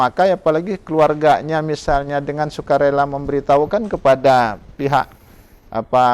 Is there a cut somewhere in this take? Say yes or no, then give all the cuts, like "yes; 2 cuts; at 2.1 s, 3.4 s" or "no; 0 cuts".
no; 0 cuts